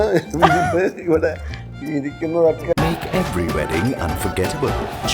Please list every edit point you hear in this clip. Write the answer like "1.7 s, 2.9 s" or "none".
2.6 s